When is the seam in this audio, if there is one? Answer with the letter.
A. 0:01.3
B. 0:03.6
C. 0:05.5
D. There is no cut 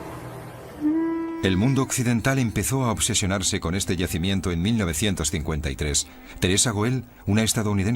C